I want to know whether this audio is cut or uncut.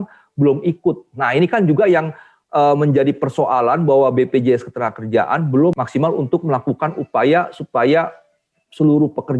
cut